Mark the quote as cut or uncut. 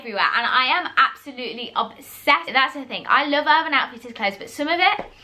cut